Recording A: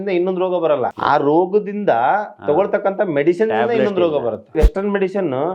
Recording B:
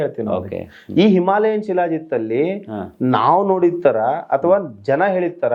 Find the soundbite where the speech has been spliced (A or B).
A